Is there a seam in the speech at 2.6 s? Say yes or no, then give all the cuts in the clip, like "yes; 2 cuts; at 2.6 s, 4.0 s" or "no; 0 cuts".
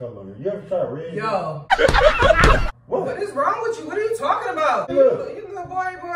yes; 2 cuts; at 2.6 s, 4.9 s